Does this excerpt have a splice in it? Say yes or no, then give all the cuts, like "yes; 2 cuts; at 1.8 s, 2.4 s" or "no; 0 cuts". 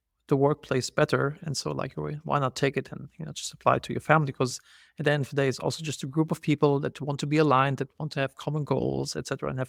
no; 0 cuts